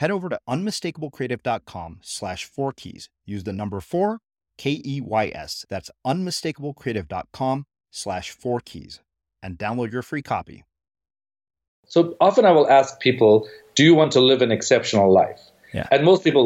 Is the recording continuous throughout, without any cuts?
no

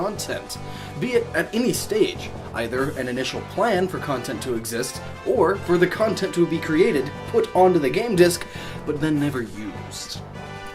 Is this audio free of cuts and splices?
no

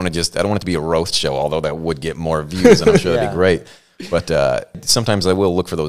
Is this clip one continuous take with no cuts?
no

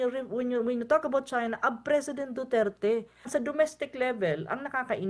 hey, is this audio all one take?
no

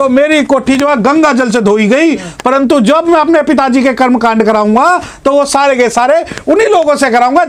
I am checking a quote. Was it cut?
no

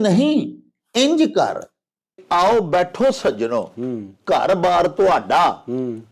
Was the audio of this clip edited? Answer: yes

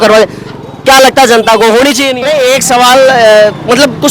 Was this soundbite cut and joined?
yes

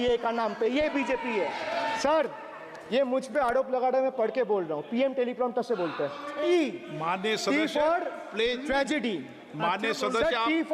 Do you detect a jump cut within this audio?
yes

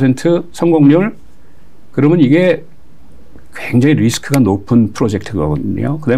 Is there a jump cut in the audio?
no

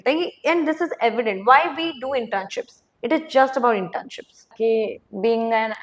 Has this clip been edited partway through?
yes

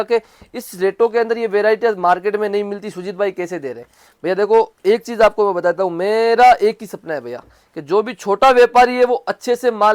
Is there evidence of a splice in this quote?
no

